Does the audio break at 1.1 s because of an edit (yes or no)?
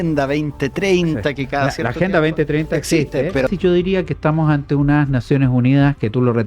no